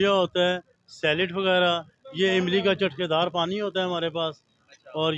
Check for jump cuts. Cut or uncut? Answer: uncut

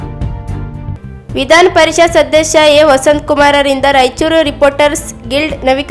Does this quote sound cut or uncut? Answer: cut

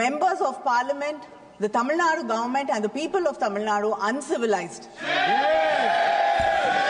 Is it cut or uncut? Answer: uncut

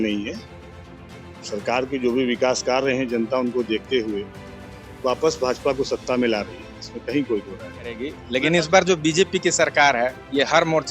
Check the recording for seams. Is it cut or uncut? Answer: cut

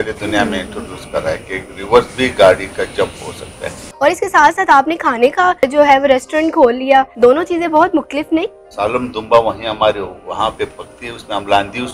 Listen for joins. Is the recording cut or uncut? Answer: cut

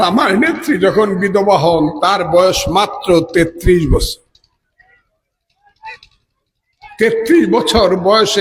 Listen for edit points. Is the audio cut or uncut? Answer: uncut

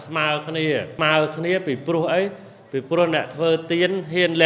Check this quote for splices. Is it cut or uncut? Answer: cut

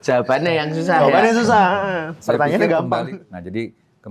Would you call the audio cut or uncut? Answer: cut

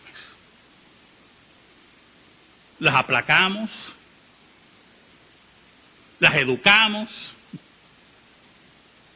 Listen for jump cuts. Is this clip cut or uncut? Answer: cut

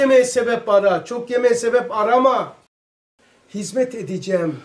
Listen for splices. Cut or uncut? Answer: cut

